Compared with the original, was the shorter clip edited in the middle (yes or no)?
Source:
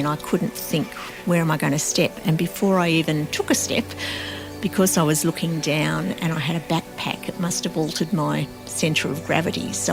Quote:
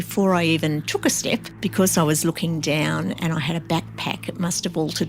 yes